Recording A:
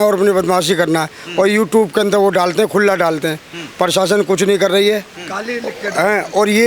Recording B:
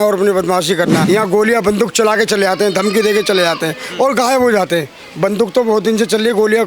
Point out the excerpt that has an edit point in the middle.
B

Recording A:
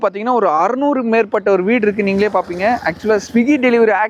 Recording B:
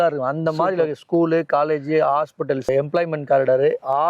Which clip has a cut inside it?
B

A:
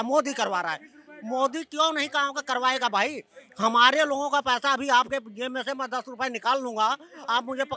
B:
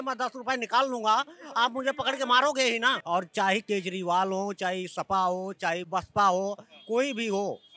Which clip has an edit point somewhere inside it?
B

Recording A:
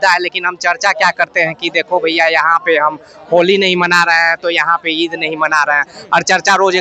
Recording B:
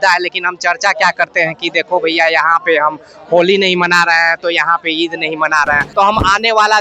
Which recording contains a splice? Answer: B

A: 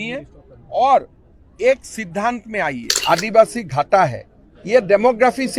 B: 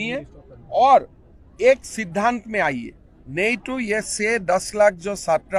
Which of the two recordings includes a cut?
A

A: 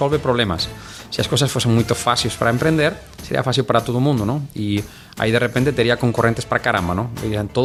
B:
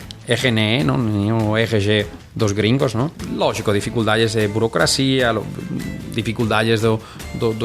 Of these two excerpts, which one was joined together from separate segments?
B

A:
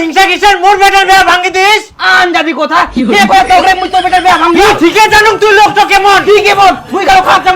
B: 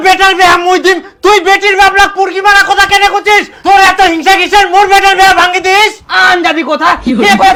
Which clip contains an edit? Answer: A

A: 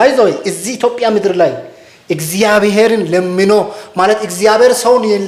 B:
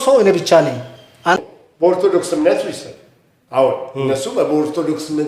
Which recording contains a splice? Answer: B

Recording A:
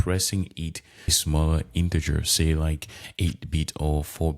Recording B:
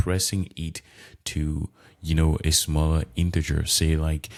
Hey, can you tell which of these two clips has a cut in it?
A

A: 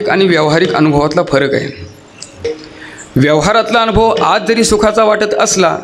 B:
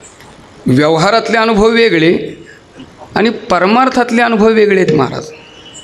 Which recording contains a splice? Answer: A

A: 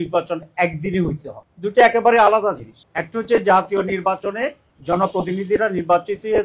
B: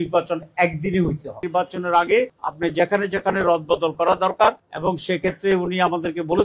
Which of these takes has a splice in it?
B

